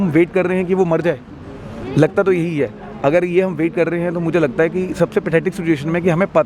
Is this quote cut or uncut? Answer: uncut